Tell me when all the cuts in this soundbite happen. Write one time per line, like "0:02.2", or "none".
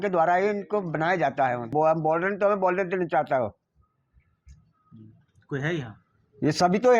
0:01.6

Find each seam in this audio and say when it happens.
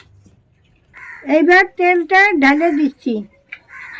0:01.1

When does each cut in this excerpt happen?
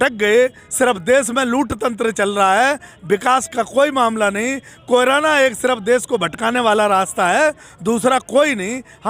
none

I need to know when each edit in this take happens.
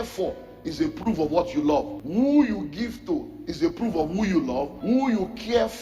0:02.0
0:04.7

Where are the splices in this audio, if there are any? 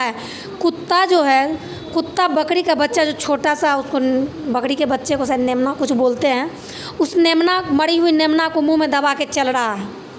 none

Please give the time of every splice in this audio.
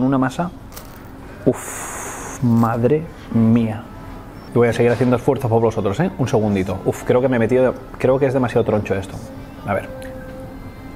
0:04.4

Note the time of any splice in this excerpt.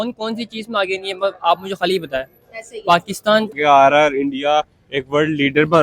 0:03.5

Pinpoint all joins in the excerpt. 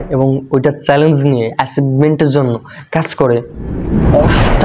none

